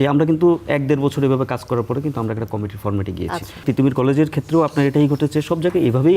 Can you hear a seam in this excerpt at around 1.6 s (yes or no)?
no